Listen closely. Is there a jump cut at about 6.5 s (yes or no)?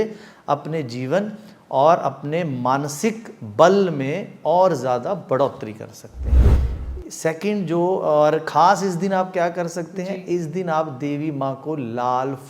yes